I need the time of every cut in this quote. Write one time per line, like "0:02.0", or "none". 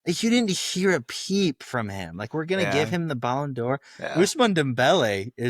none